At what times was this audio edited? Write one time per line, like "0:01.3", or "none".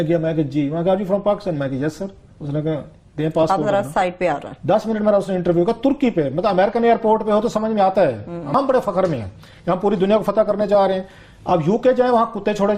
none